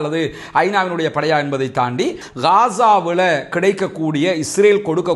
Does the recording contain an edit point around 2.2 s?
yes; 1 cut; at 2.2 s

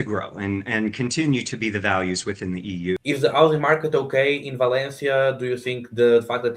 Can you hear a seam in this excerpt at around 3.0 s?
yes; 1 cut; at 3.0 s

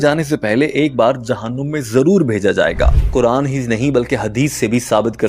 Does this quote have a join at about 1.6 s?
no; 1 cut; at 3.1 s

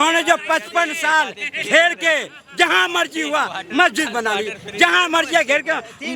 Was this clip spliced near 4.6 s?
no; 0 cuts

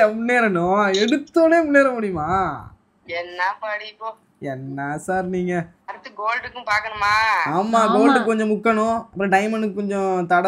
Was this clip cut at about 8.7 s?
no; 1 cut; at 6.1 s

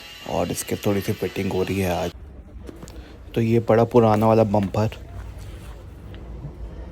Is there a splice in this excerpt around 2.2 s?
yes; 1 cut; at 2.2 s

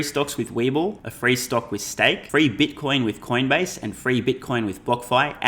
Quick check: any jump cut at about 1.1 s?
yes; 2 cuts; at 1.1 s, 2.2 s

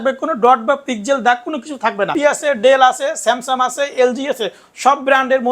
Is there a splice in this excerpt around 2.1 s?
yes; 1 cut; at 2.1 s

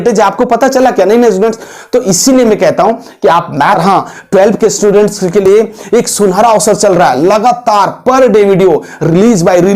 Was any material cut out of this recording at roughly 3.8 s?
yes; 1 cut; at 3.8 s

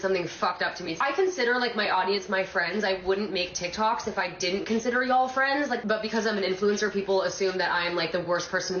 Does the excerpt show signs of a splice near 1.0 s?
yes; 2 cuts; at 1.0 s, 5.8 s

